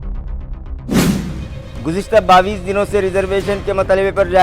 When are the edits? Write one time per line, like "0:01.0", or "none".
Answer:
0:01.4